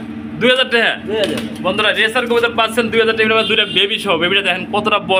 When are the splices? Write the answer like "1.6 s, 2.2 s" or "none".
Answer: none